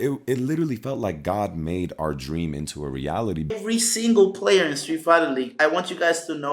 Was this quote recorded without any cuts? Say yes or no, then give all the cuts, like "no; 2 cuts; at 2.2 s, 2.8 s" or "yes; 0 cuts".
no; 1 cut; at 3.6 s